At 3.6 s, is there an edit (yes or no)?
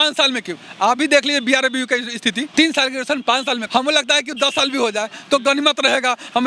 yes